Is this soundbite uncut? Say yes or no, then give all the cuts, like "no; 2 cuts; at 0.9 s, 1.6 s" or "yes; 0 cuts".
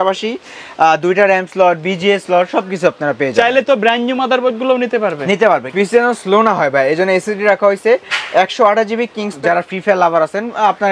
no; 2 cuts; at 5.7 s, 9.3 s